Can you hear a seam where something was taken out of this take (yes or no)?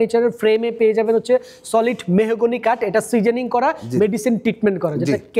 no